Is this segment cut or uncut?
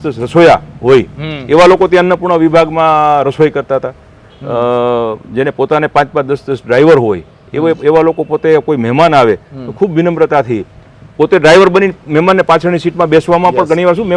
uncut